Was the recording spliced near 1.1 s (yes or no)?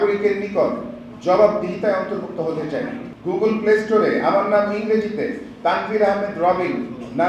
no